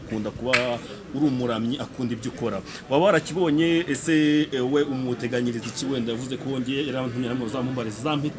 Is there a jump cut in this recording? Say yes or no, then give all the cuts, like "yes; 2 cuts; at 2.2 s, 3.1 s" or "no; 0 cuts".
no; 0 cuts